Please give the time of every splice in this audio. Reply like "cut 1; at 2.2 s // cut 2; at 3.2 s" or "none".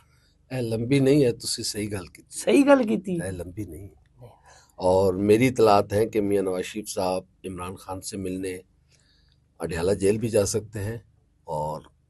none

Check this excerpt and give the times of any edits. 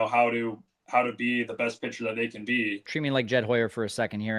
cut 1; at 2.9 s

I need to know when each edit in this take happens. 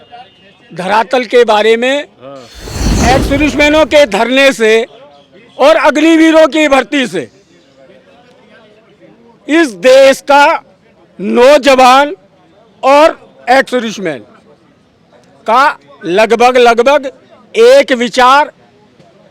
cut 1; at 2.9 s

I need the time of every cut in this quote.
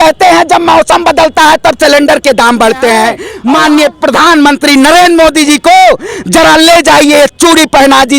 cut 1; at 3.3 s

